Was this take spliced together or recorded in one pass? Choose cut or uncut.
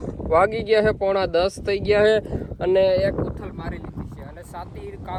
uncut